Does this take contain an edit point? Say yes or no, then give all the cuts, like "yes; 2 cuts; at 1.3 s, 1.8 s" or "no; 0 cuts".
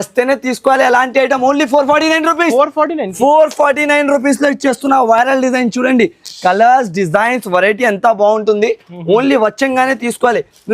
no; 0 cuts